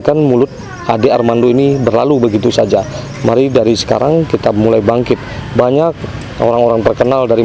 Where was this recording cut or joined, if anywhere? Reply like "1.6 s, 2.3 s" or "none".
none